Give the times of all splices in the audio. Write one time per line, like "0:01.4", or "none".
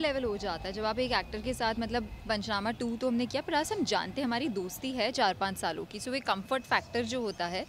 none